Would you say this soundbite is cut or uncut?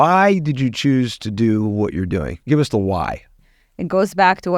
cut